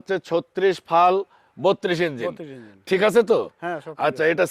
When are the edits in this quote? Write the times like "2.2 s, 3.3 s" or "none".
none